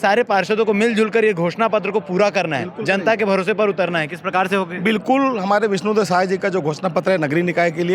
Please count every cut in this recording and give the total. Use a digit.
0